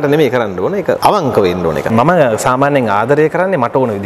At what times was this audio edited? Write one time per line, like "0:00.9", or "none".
0:01.0
0:01.9